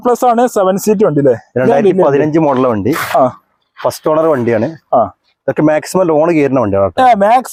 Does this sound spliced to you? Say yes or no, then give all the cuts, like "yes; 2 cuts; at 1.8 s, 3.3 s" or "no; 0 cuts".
no; 0 cuts